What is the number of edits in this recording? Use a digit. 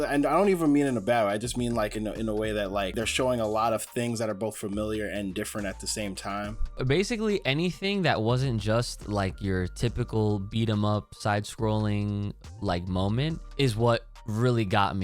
3